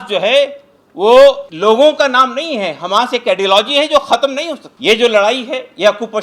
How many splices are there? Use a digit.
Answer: 2